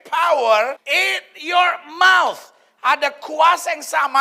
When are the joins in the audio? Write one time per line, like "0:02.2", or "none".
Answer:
none